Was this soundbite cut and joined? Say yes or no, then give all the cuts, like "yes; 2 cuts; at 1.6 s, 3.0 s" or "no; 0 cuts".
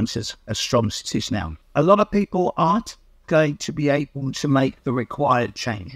yes; 1 cut; at 1.6 s